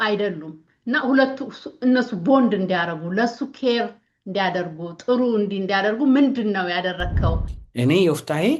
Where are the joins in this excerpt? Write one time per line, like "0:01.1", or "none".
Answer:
0:07.6